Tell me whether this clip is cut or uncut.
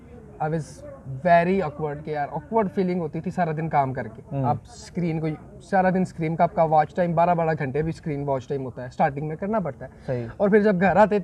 uncut